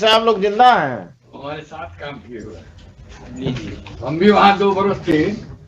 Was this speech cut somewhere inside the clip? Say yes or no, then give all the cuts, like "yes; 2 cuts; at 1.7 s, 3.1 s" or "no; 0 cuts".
no; 0 cuts